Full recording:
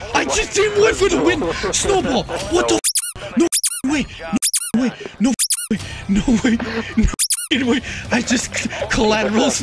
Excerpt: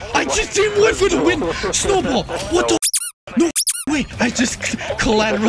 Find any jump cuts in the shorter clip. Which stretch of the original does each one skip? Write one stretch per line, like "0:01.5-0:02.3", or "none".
0:04.1-0:08.0